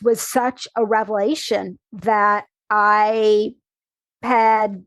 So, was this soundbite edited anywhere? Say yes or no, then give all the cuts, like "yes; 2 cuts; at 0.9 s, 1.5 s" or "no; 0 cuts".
no; 0 cuts